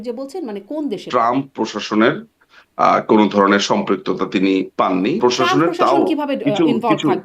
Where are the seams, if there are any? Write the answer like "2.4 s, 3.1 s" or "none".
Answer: 1.0 s, 5.2 s